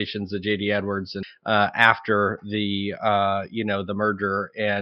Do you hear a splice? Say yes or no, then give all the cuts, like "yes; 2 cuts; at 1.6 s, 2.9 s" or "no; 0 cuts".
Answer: no; 0 cuts